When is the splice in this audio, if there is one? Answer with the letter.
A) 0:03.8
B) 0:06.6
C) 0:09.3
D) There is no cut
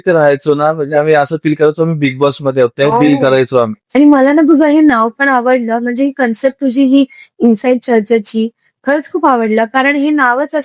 A